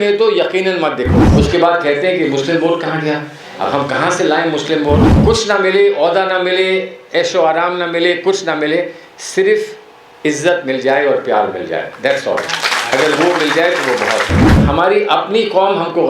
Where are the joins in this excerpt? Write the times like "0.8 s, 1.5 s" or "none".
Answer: 1.2 s, 5.1 s, 14.6 s